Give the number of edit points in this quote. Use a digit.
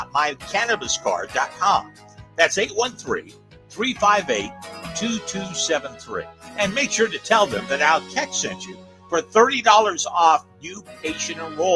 1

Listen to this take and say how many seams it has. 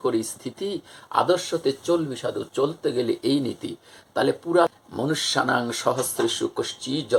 1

